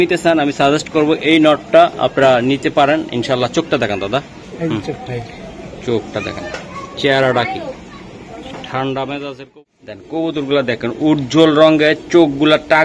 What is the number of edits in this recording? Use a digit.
1